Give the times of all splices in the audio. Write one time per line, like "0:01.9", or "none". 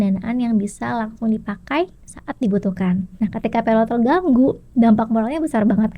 0:03.1